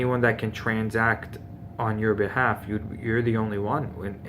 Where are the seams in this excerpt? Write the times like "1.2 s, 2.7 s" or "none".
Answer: 2.0 s